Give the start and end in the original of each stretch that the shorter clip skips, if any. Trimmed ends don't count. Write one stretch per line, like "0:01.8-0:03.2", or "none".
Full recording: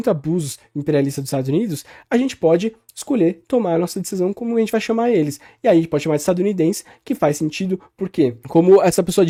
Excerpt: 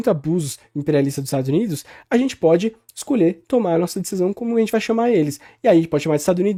none